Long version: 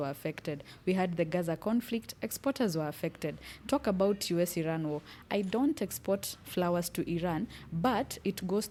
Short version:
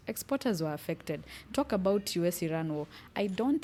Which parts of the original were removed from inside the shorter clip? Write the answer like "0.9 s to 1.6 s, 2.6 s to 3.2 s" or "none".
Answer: none